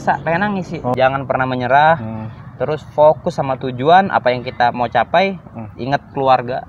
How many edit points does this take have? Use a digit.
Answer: 1